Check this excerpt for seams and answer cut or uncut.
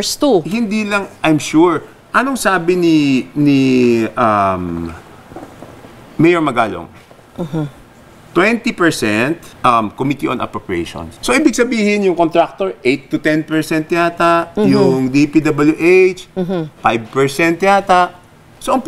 cut